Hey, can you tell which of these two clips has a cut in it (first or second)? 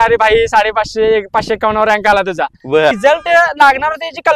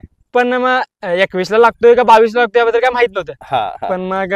first